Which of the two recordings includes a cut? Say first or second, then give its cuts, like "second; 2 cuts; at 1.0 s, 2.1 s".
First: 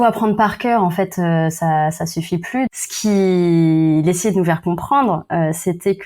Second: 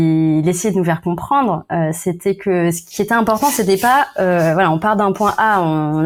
first; 1 cut; at 2.7 s